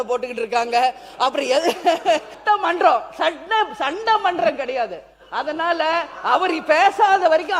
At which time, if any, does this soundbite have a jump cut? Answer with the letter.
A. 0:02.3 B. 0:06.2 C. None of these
A